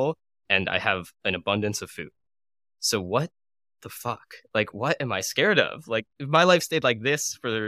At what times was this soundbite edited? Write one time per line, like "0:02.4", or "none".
0:04.7
0:06.1